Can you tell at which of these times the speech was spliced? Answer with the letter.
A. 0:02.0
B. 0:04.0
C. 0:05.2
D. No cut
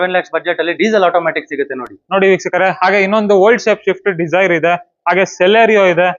D